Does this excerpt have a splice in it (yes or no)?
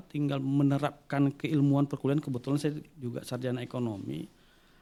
no